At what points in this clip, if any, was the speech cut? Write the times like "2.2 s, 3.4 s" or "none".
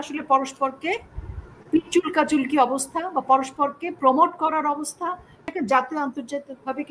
5.4 s